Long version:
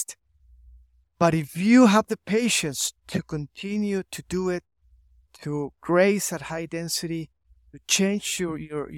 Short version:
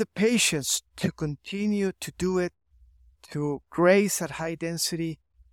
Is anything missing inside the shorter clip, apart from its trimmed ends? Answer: no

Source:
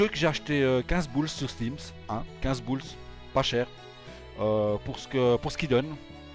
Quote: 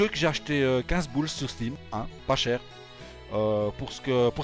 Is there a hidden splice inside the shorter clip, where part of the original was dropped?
yes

